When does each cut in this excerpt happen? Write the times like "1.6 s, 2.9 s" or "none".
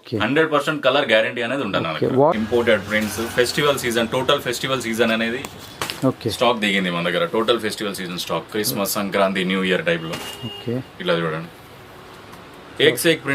2.3 s

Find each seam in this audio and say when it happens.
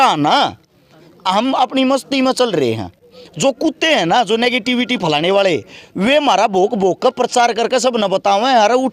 none

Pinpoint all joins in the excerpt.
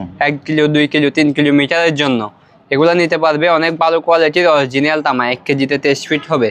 none

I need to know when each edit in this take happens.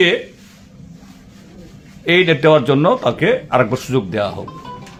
none

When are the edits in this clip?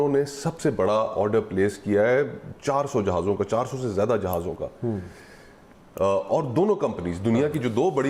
none

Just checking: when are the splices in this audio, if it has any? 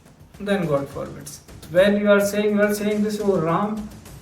1.6 s

